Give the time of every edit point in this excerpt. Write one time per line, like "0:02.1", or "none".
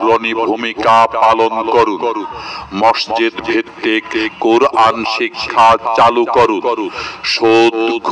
none